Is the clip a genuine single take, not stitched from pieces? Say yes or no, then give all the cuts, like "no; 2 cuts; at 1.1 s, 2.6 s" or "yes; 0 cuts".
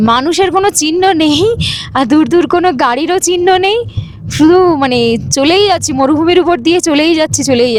yes; 0 cuts